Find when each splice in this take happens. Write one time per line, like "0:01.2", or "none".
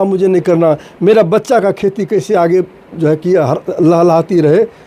none